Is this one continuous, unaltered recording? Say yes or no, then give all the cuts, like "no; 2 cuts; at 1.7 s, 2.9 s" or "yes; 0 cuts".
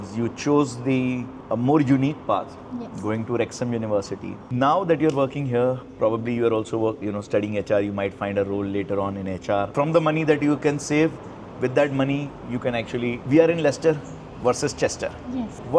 no; 3 cuts; at 4.4 s, 9.7 s, 13.2 s